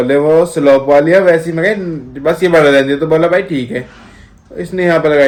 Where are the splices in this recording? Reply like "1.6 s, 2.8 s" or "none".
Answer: none